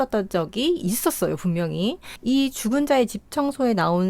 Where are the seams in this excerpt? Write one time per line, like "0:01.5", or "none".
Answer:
0:02.1